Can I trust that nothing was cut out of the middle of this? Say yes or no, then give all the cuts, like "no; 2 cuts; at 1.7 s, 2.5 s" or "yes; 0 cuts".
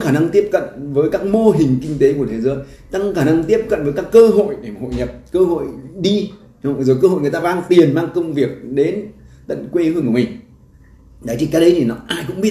yes; 0 cuts